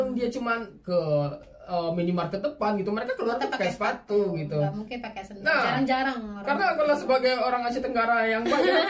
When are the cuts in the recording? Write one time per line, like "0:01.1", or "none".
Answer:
none